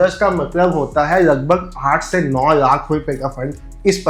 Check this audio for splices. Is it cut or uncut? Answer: uncut